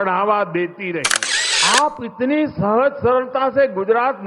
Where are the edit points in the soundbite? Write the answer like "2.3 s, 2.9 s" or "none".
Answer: 1.2 s